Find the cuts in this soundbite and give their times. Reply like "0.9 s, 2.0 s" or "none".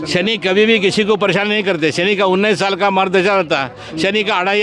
none